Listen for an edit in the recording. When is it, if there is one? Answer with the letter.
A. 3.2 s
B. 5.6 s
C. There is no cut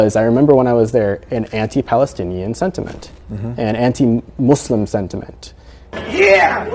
C